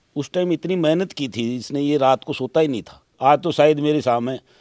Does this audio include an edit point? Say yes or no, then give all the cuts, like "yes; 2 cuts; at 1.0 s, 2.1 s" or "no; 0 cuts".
yes; 1 cut; at 3.0 s